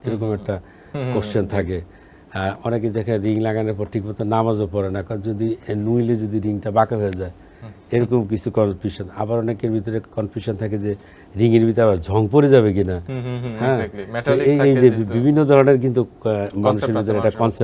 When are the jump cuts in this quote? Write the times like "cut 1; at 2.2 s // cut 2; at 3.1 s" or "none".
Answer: none